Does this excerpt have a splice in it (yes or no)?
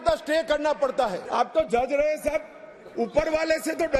yes